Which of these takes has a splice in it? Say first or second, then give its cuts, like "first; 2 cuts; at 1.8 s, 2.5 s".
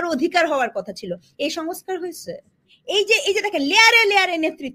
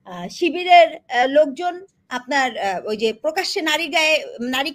first; 1 cut; at 2.7 s